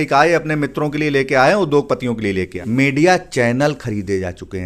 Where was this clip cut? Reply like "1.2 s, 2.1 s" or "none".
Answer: 2.5 s